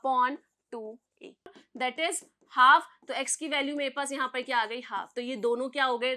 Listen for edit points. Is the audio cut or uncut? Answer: cut